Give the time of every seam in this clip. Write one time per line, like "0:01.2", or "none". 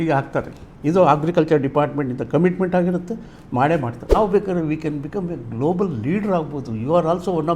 0:04.1